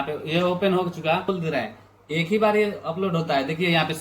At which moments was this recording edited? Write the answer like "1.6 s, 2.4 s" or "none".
1.3 s